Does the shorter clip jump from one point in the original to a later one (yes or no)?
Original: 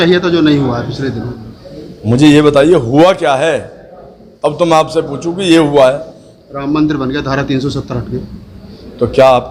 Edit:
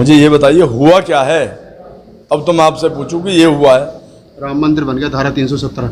no